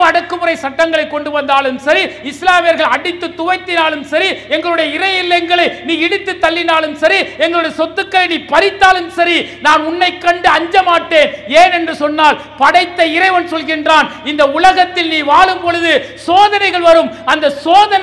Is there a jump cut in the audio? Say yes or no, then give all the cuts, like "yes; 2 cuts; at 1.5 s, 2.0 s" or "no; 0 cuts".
no; 0 cuts